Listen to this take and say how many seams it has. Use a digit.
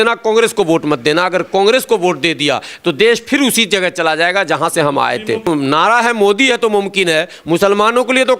1